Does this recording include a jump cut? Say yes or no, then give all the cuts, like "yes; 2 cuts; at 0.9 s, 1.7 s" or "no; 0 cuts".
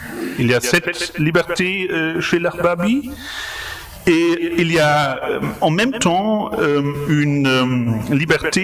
no; 0 cuts